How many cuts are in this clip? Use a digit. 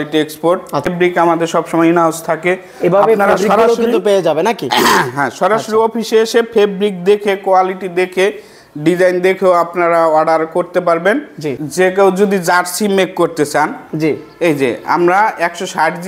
2